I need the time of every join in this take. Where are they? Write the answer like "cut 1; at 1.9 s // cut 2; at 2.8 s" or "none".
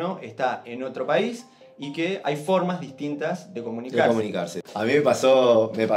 cut 1; at 4.5 s